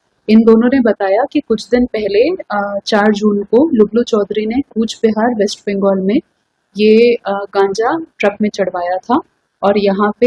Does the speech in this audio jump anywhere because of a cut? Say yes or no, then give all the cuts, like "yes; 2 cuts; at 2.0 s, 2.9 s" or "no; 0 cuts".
no; 0 cuts